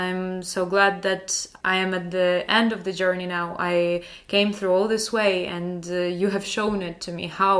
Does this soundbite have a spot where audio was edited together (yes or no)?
yes